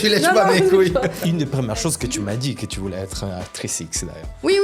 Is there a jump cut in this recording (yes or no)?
yes